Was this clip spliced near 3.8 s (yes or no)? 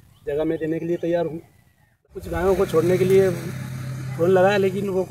no